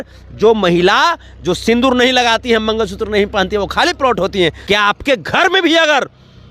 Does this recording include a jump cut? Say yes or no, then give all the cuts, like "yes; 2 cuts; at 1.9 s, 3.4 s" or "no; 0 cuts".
yes; 1 cut; at 4.6 s